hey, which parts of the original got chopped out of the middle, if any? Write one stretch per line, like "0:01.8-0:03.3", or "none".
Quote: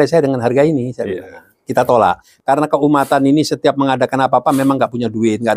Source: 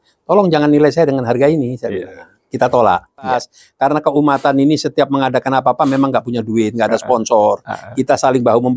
0:03.1-0:03.6